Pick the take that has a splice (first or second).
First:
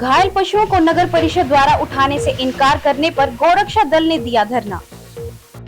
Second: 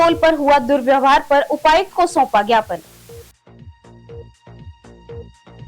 second